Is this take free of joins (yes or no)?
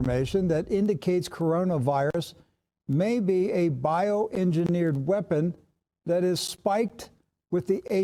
yes